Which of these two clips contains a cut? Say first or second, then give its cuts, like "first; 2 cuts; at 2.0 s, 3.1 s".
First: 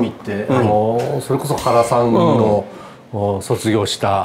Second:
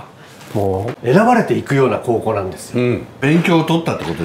second; 2 cuts; at 0.9 s, 3.2 s